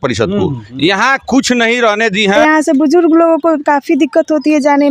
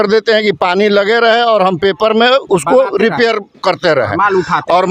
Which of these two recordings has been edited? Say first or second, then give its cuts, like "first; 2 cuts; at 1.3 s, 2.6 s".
first; 1 cut; at 2.4 s